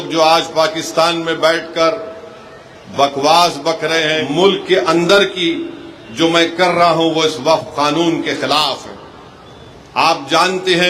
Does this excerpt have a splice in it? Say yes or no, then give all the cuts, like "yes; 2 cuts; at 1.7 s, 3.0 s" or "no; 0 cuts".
yes; 1 cut; at 4.2 s